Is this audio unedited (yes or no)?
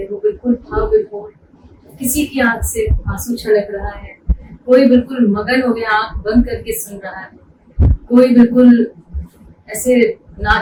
yes